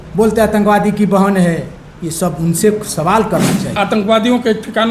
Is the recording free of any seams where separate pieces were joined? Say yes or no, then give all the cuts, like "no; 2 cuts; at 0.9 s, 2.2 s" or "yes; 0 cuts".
no; 1 cut; at 3.6 s